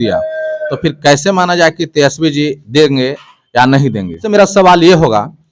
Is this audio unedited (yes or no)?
no